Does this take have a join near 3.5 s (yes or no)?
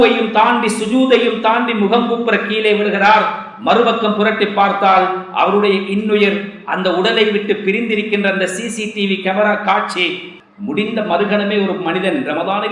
no